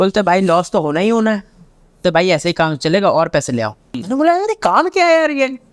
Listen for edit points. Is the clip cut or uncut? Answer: cut